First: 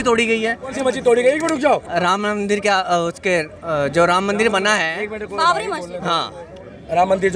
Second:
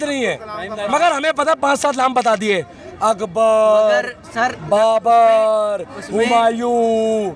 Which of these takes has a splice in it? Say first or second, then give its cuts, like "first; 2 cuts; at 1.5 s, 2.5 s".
first; 2 cuts; at 0.7 s, 1.9 s